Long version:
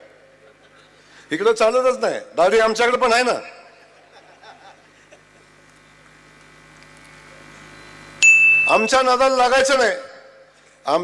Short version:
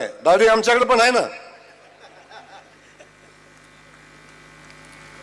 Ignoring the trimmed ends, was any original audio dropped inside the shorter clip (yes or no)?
no